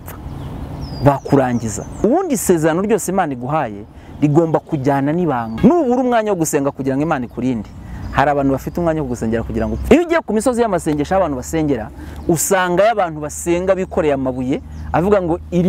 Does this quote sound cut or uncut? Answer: cut